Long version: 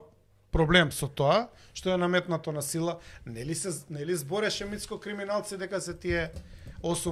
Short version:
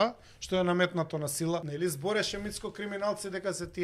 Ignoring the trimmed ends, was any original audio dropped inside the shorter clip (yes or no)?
yes